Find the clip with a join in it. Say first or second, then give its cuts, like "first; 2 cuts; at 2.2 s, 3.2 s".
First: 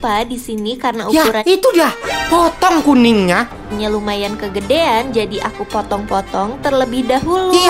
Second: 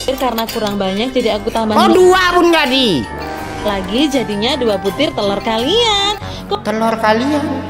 first; 1 cut; at 3.5 s